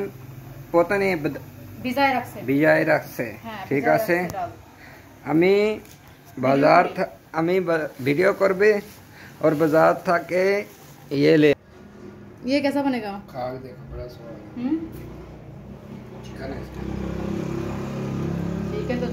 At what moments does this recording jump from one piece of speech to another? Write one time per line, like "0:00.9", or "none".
0:11.5